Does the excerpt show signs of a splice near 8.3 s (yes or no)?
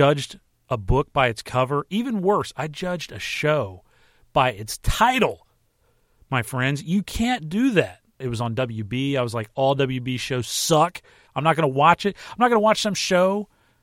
yes